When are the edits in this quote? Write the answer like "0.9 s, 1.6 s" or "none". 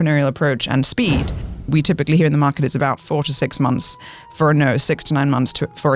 1.7 s

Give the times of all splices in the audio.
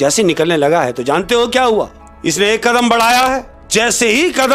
2.0 s, 3.6 s

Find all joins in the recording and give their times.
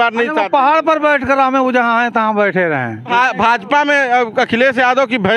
3.0 s

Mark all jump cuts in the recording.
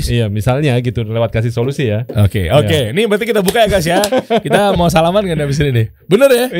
none

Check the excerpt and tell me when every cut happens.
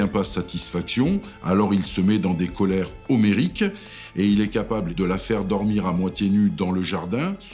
4.9 s

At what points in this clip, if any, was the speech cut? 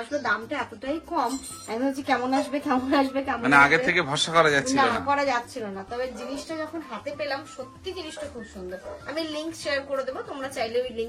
none

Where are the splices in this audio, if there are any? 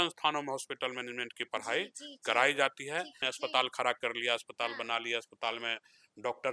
3.2 s

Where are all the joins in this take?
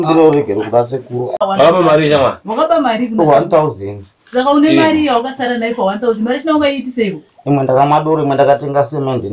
1.3 s

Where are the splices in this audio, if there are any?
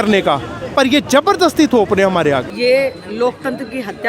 2.5 s

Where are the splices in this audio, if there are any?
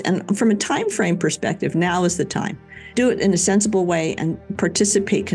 2.9 s, 4.4 s

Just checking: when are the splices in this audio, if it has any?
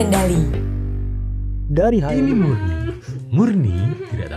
2.1 s

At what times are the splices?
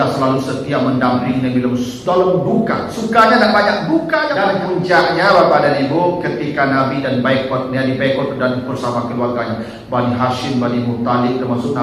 4.3 s

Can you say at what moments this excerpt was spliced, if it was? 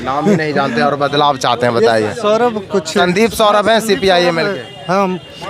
none

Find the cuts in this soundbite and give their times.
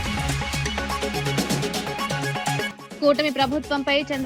0.9 s, 2.2 s

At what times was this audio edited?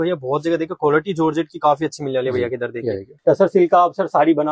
3.1 s

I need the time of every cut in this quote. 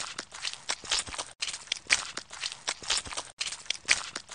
2.0 s

